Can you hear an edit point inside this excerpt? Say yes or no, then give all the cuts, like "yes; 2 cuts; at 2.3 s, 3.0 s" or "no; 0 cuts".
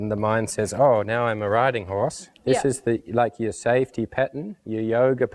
yes; 1 cut; at 2.3 s